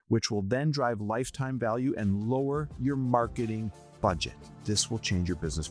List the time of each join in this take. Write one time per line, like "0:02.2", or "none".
0:04.6